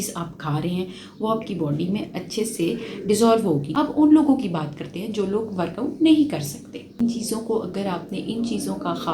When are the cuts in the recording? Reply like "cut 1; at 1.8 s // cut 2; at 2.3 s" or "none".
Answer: cut 1; at 3.7 s // cut 2; at 7.0 s